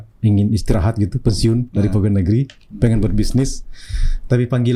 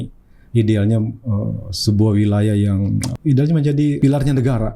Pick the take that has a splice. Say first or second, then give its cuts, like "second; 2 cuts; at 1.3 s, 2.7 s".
second; 2 cuts; at 3.1 s, 4.0 s